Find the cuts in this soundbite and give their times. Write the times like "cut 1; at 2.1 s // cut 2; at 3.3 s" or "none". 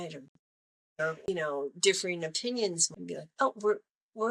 cut 1; at 1.3 s // cut 2; at 2.8 s